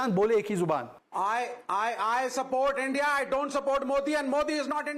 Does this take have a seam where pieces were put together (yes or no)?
yes